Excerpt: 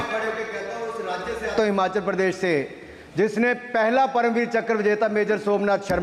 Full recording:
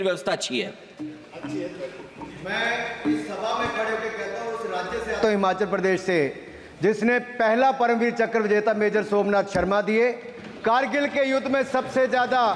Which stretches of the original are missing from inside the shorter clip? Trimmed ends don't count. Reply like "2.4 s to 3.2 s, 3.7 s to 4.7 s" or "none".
none